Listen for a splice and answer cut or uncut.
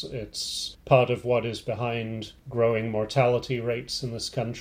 uncut